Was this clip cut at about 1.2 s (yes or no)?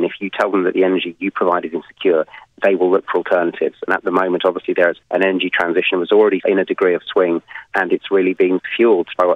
no